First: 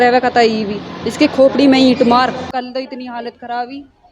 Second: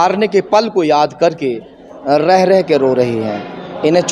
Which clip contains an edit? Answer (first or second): first